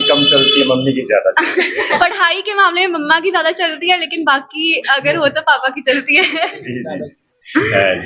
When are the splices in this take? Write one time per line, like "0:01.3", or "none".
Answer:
none